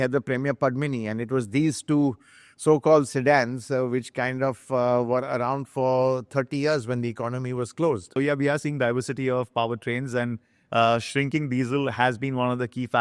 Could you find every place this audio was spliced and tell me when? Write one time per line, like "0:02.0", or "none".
0:08.1